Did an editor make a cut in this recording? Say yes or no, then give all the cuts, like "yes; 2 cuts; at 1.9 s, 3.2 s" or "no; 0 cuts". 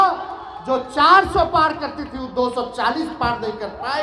no; 0 cuts